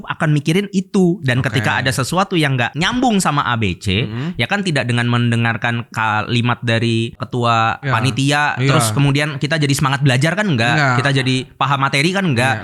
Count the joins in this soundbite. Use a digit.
0